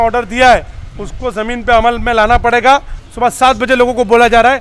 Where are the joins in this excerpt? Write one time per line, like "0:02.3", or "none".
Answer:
0:03.0